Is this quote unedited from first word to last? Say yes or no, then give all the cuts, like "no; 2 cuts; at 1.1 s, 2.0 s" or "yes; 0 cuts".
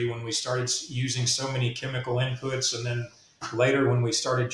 yes; 0 cuts